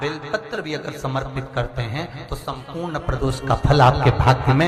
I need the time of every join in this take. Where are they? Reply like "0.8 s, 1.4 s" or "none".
none

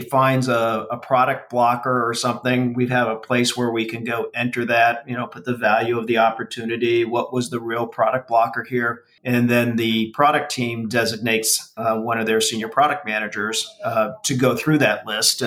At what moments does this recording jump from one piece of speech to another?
9.1 s

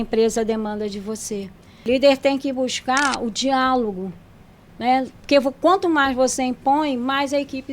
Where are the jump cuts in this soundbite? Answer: 1.9 s

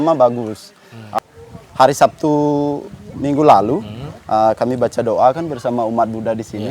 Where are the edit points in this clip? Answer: 1.2 s

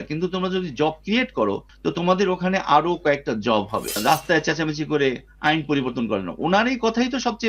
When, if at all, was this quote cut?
4.0 s

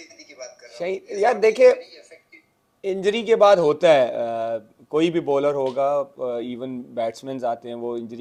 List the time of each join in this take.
none

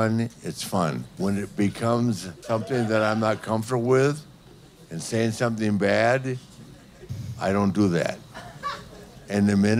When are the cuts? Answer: 1.1 s, 2.3 s

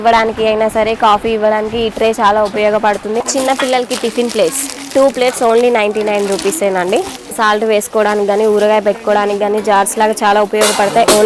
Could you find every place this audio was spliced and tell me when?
3.2 s, 7.2 s

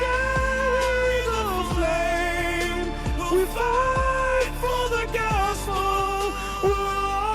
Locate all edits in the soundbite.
none

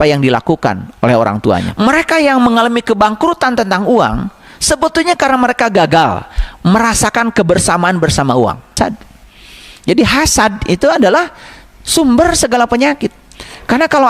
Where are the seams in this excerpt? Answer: 1.7 s, 8.7 s

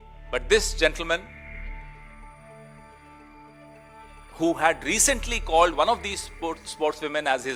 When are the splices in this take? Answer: none

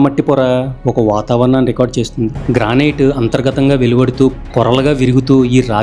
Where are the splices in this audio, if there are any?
2.4 s

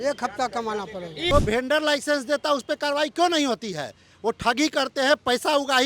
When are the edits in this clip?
1.3 s

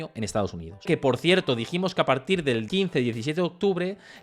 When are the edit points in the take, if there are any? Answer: 0.9 s, 2.7 s

